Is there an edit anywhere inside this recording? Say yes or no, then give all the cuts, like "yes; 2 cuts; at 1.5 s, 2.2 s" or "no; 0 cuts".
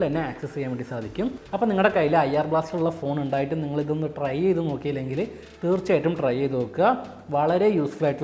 no; 0 cuts